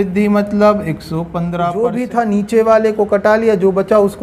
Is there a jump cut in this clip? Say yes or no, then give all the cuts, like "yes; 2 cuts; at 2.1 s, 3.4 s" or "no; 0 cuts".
yes; 1 cut; at 1.7 s